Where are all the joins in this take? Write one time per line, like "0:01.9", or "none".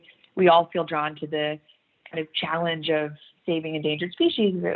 none